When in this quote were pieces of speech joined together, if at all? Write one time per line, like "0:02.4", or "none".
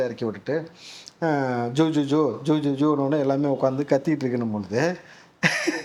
none